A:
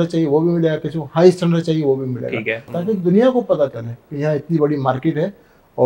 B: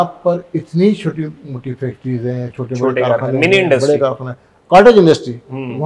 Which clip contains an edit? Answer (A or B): A